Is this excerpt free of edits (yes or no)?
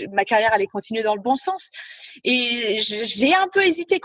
yes